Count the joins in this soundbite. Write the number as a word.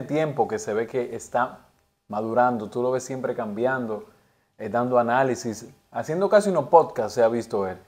zero